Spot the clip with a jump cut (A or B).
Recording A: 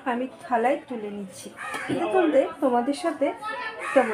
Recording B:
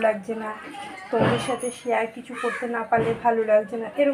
A